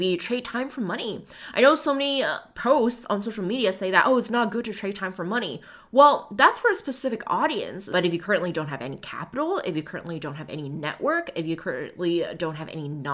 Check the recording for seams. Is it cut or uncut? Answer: cut